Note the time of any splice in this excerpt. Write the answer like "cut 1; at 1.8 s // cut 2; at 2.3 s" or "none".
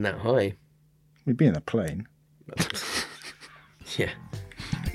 none